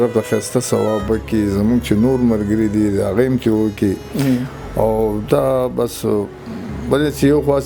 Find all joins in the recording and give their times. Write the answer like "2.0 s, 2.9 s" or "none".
none